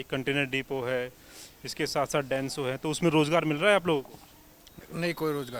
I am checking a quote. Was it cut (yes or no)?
no